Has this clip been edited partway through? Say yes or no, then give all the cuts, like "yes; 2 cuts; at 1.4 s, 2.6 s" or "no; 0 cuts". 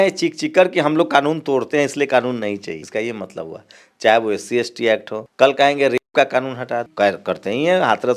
no; 0 cuts